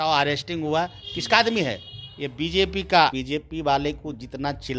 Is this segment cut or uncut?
cut